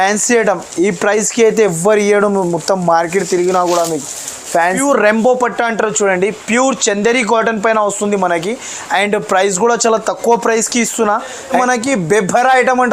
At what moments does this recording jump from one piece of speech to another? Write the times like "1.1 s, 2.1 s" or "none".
4.7 s, 11.6 s